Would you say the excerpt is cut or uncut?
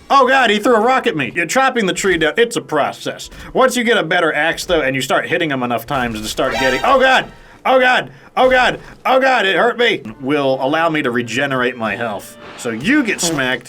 cut